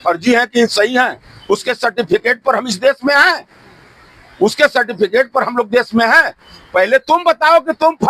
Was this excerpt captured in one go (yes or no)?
yes